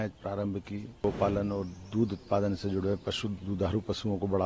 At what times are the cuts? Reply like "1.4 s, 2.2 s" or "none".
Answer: 1.0 s